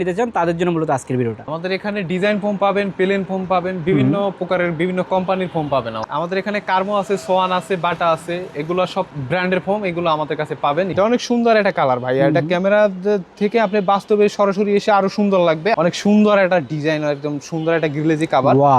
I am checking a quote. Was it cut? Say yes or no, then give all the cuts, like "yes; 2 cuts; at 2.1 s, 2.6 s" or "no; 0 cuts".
yes; 4 cuts; at 1.4 s, 6.0 s, 10.9 s, 15.7 s